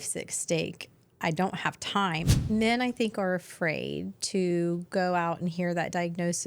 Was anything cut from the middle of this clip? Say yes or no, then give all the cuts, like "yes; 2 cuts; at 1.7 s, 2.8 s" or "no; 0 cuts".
yes; 1 cut; at 2.3 s